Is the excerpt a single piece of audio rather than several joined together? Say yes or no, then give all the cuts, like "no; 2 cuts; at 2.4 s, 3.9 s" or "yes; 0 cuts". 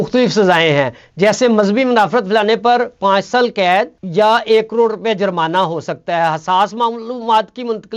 yes; 0 cuts